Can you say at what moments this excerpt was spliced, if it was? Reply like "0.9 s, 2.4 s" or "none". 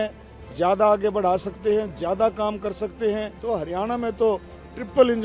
3.3 s